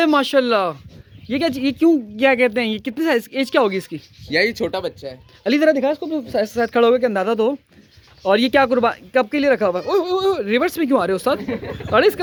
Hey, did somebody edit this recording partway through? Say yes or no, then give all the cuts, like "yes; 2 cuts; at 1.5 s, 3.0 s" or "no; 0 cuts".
no; 0 cuts